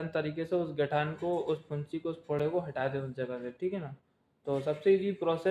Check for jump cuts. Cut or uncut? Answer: uncut